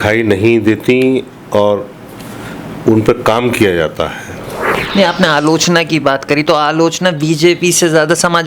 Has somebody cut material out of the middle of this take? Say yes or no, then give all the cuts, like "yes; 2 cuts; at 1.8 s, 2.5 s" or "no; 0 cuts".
yes; 1 cut; at 4.7 s